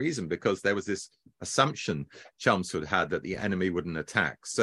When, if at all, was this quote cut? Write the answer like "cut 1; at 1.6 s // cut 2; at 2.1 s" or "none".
none